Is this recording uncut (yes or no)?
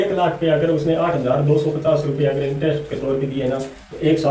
yes